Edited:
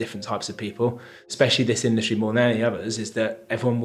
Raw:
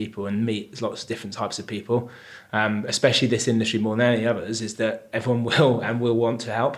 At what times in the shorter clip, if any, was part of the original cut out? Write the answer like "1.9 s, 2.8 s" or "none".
1.3 s